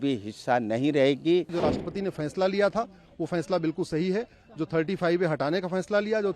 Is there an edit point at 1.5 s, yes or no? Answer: yes